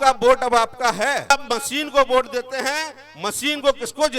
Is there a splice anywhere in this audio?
yes; 1 cut; at 1.3 s

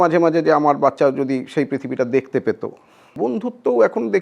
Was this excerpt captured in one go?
no; 1 cut; at 3.1 s

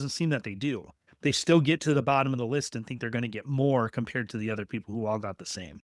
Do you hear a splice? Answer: no; 0 cuts

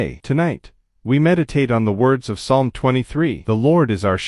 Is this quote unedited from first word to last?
yes; 0 cuts

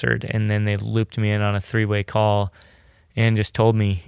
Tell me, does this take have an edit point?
no; 0 cuts

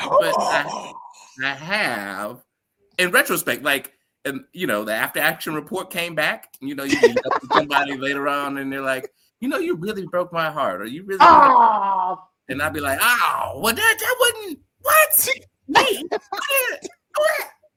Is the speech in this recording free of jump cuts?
yes; 0 cuts

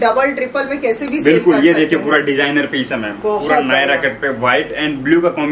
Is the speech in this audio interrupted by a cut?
no; 0 cuts

